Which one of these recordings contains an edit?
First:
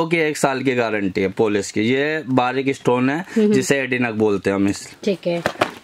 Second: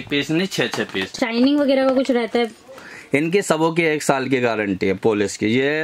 second; 1 cut; at 1.1 s

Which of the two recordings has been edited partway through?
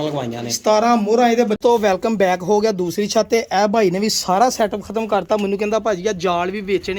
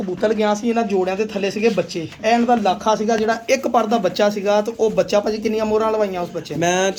first; 1 cut; at 1.6 s

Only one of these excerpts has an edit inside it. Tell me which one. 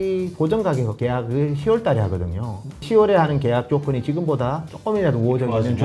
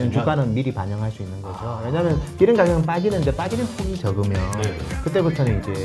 first; 3 cuts; at 0.9 s, 2.8 s, 4.7 s

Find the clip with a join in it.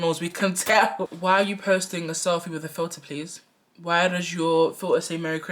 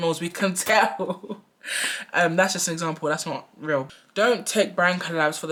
first; 1 cut; at 1.1 s

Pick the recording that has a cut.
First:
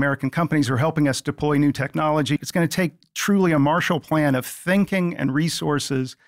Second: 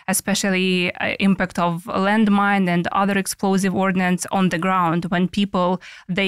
first; 1 cut; at 2.4 s

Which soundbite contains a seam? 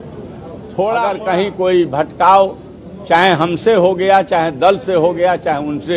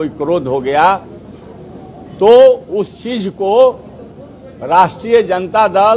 first; 1 cut; at 1.1 s

